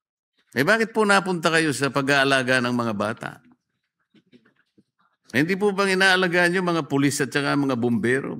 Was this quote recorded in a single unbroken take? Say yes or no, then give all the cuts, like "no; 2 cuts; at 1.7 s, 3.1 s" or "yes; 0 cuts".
no; 1 cut; at 4.6 s